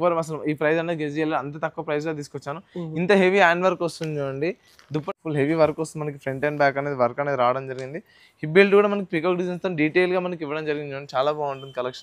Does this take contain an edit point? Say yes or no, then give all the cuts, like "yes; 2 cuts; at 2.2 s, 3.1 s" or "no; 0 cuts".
yes; 1 cut; at 5.2 s